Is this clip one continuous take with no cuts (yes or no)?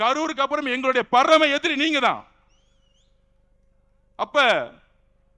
yes